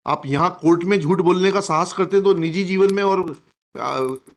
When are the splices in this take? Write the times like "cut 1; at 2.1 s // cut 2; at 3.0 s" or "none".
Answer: none

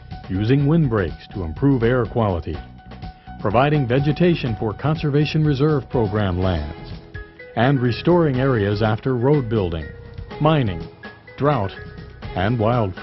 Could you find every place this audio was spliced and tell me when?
cut 1; at 8.8 s

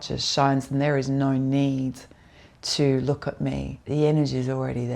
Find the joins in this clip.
cut 1; at 3.7 s

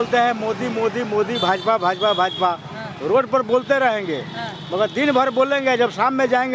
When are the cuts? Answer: none

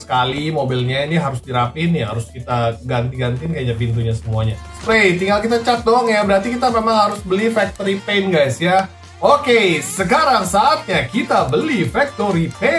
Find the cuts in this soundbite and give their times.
cut 1; at 4.7 s

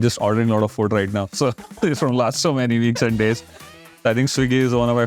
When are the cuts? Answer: cut 1; at 3.7 s

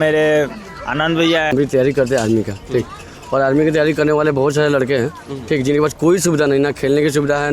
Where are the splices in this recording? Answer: cut 1; at 1.5 s

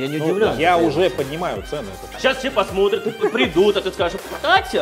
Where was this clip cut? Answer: cut 1; at 2.1 s

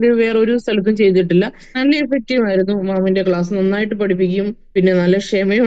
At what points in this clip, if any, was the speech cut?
cut 1; at 1.6 s // cut 2; at 4.6 s

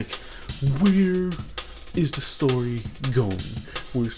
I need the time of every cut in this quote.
none

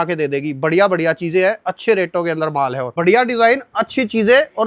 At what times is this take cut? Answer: cut 1; at 2.9 s

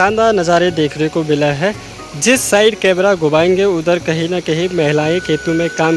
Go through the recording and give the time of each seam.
none

